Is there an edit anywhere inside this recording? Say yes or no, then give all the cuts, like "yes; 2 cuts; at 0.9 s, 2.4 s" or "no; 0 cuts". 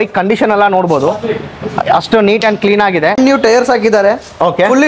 yes; 1 cut; at 3.2 s